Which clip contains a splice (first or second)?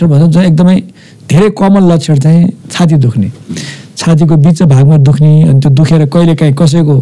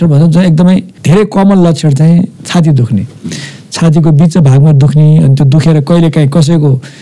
second